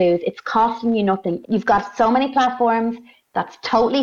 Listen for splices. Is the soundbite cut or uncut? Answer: cut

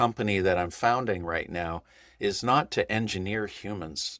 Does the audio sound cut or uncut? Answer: uncut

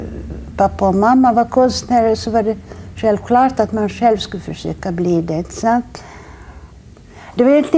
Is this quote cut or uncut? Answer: uncut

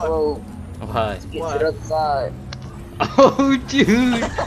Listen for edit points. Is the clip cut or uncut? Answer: uncut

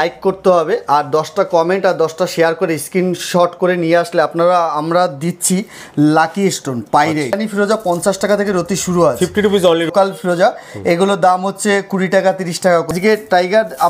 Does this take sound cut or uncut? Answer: cut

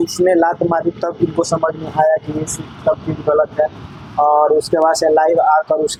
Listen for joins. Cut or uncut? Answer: uncut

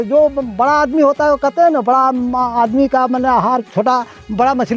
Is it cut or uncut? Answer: uncut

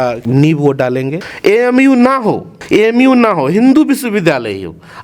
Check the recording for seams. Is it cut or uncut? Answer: cut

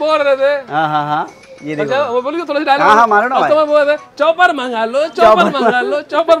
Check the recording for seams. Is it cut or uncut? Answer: uncut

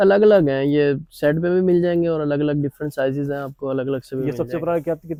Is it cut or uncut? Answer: uncut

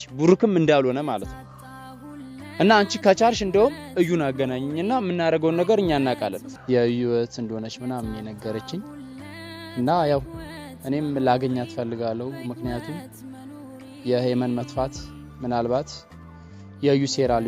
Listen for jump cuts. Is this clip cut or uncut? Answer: cut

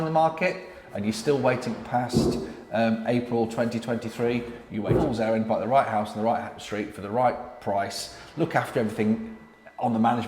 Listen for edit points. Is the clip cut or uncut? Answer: cut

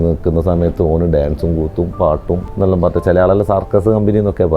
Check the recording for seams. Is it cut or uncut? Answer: cut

